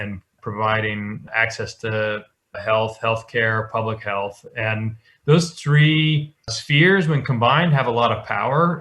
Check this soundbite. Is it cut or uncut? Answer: uncut